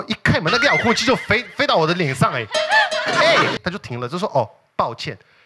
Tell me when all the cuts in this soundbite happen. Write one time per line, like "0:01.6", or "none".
0:03.6